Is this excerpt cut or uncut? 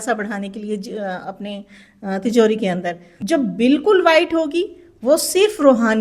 cut